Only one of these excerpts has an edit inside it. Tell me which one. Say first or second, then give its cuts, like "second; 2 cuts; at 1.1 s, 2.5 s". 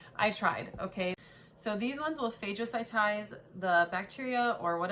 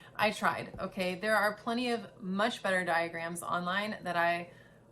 first; 1 cut; at 1.2 s